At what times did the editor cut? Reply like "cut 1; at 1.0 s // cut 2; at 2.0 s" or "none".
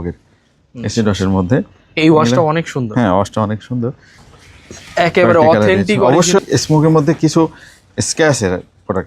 cut 1; at 4.2 s // cut 2; at 6.4 s

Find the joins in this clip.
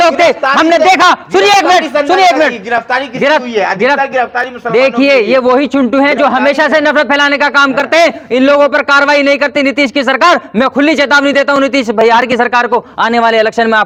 none

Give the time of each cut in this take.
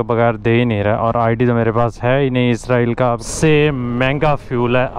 cut 1; at 3.2 s

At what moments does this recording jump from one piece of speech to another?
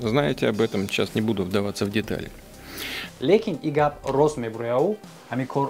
none

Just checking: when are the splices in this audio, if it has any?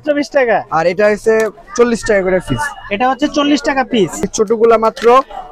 cut 1; at 4.2 s

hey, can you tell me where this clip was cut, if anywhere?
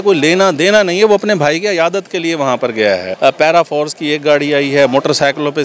cut 1; at 3.1 s

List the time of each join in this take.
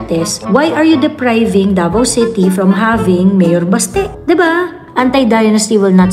cut 1; at 4.8 s

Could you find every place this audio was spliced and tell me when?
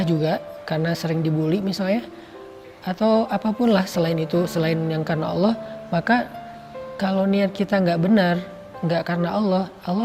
none

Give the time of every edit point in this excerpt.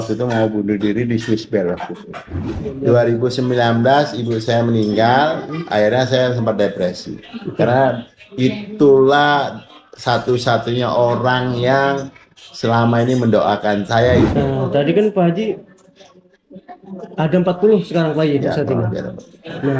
cut 1; at 2.6 s // cut 2; at 14.4 s

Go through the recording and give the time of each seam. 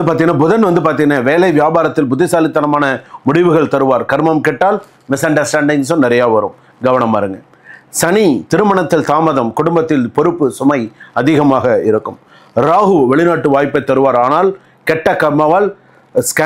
none

